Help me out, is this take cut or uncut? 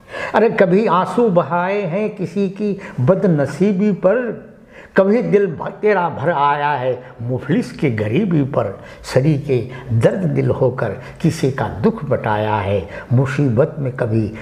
uncut